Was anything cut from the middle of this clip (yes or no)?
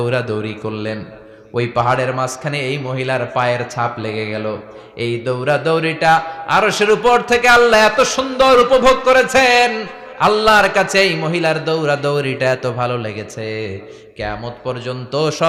no